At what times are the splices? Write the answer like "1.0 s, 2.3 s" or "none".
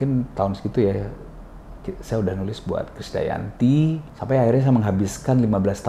4.1 s